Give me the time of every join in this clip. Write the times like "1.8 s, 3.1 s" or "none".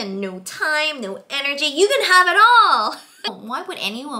3.3 s